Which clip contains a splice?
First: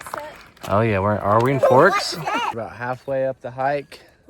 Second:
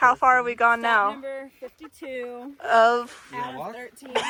first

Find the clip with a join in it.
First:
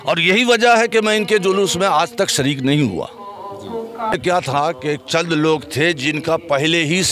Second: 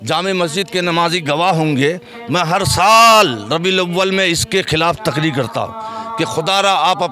first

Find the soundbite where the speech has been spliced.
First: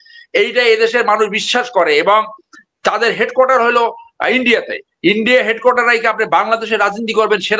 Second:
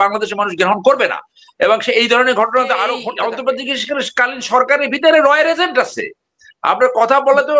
second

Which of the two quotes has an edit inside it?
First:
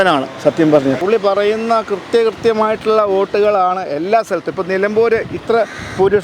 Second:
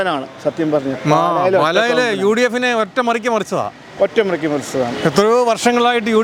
first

